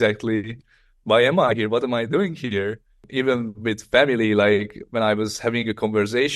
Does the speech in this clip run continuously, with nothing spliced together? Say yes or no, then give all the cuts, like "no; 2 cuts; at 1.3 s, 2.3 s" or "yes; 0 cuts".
no; 1 cut; at 3.1 s